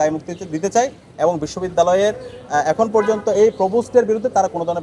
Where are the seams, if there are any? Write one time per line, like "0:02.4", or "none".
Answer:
none